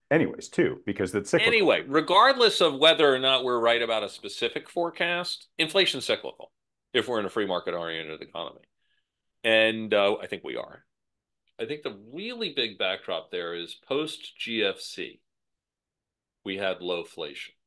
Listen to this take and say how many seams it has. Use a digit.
1